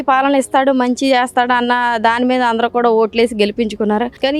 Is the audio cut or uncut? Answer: uncut